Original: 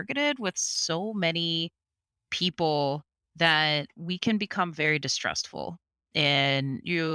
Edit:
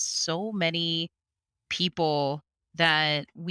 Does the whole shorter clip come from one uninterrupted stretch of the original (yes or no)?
yes